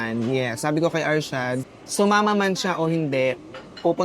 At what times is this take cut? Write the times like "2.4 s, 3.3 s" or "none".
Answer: 1.8 s